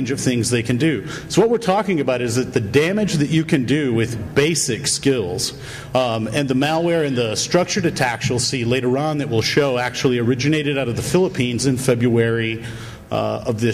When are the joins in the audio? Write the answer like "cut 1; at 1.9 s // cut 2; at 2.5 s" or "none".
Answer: none